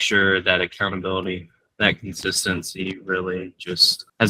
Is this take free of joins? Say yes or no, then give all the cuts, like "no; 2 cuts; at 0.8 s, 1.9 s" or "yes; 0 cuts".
yes; 0 cuts